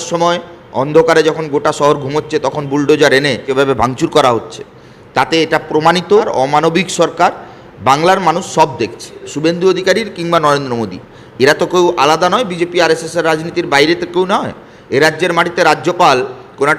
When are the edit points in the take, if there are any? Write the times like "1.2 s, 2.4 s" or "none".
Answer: 3.4 s, 6.3 s, 9.3 s